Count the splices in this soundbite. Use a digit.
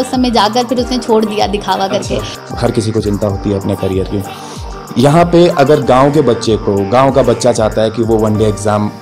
1